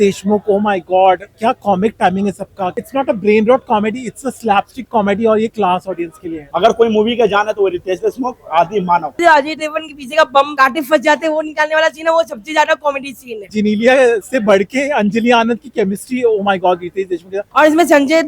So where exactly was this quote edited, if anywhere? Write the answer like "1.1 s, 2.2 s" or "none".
2.8 s, 6.5 s, 9.2 s, 13.5 s, 17.5 s